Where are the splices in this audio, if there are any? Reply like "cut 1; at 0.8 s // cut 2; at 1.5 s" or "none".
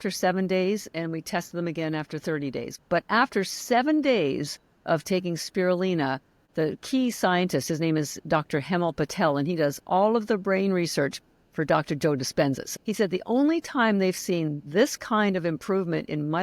cut 1; at 2.7 s // cut 2; at 6.3 s // cut 3; at 12.6 s

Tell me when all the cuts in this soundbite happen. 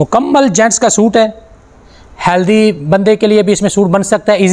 none

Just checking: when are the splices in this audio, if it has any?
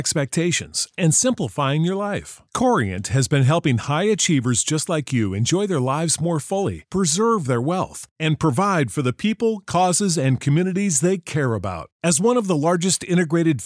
none

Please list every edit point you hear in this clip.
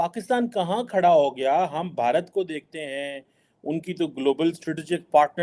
none

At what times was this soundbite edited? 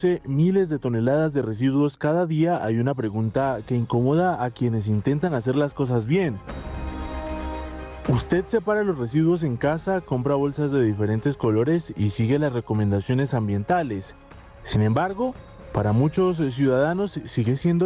none

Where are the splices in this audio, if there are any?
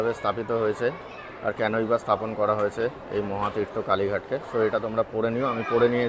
none

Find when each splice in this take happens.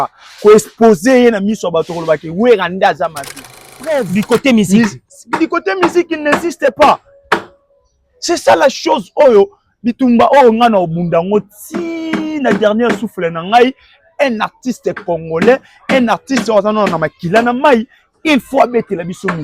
cut 1; at 3.8 s

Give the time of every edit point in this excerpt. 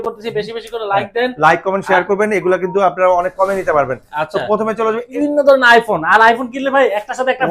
cut 1; at 5.0 s

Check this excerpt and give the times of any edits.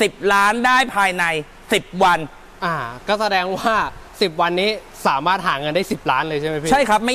none

